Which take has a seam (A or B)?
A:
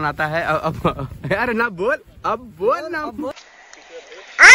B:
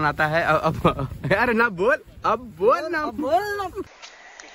A